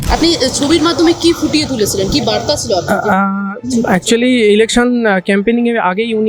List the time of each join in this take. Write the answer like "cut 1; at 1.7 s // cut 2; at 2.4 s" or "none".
none

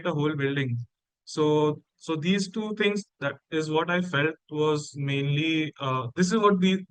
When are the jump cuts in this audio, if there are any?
none

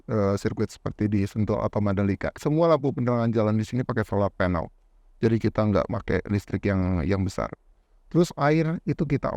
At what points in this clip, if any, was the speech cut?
cut 1; at 2.4 s

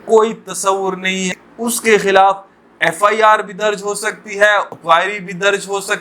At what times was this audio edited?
cut 1; at 1.3 s // cut 2; at 4.7 s

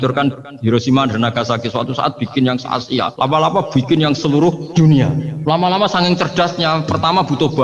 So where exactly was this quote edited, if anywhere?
cut 1; at 3.1 s // cut 2; at 4.6 s // cut 3; at 5.3 s

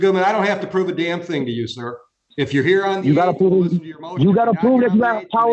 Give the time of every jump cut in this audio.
none

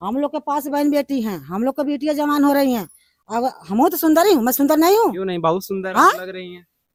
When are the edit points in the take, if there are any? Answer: none

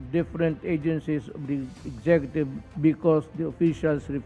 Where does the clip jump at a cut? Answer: cut 1; at 2.6 s

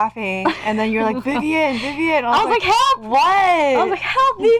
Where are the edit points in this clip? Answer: none

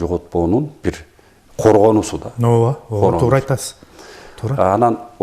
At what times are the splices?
none

